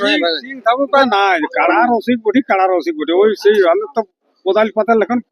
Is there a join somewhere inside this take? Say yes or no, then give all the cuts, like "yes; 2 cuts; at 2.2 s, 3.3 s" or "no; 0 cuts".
yes; 1 cut; at 1.1 s